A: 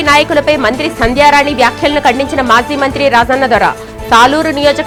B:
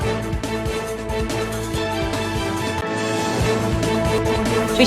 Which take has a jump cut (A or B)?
B